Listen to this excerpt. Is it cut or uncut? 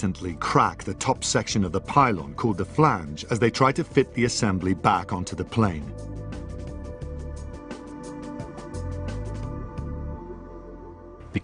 cut